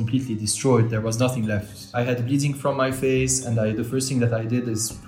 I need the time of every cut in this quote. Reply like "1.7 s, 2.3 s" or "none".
none